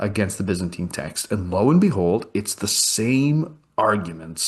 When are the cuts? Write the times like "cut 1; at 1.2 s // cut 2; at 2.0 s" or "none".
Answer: none